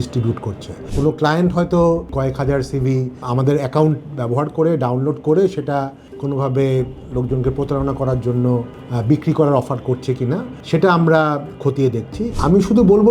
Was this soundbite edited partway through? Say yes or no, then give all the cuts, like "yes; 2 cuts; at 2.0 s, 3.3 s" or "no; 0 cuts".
yes; 3 cuts; at 0.9 s, 2.1 s, 12.4 s